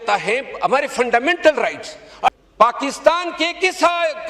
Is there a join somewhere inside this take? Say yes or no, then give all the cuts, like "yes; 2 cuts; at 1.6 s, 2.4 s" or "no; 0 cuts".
yes; 1 cut; at 2.3 s